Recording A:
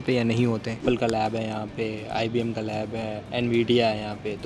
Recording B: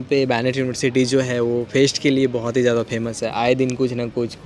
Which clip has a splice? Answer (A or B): A